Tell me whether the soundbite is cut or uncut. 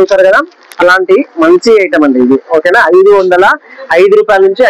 uncut